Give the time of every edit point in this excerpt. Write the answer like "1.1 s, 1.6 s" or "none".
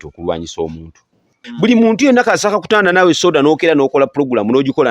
1.4 s